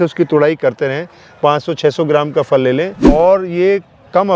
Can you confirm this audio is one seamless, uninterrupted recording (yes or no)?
no